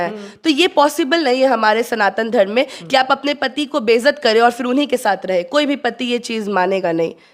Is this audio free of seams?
yes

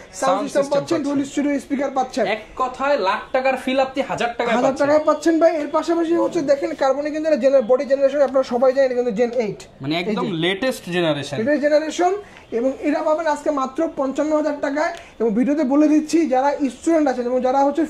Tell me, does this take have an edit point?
no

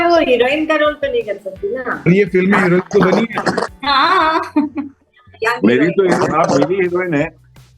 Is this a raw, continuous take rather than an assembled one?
yes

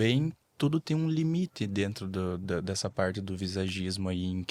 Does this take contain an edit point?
no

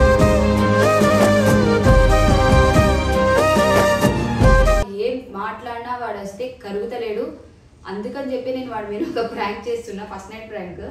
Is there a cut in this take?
yes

